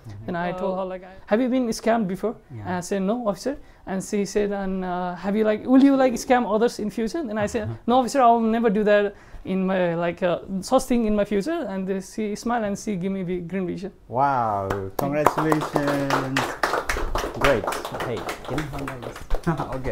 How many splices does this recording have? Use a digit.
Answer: 1